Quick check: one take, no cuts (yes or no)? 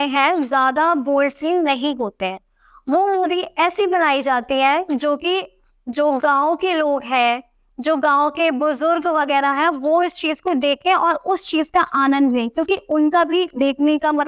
yes